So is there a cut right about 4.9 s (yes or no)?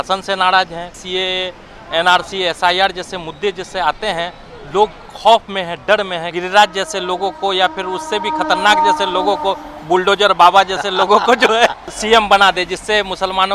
no